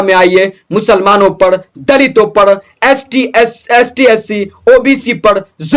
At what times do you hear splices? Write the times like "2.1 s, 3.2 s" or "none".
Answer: none